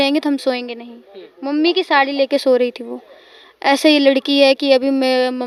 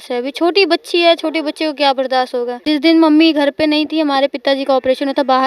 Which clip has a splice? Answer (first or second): second